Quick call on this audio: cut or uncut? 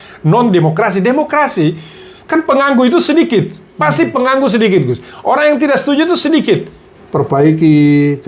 cut